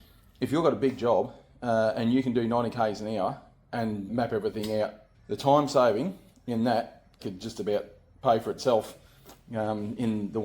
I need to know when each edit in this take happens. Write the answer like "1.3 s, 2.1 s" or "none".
4.1 s, 5.1 s, 7.1 s